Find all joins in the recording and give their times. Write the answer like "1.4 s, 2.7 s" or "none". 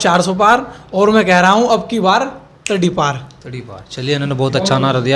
none